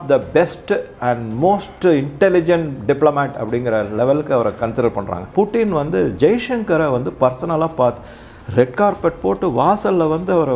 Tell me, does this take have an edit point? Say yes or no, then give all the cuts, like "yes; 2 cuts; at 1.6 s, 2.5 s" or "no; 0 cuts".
yes; 1 cut; at 5.3 s